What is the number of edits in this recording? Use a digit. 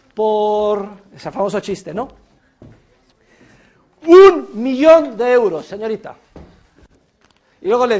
0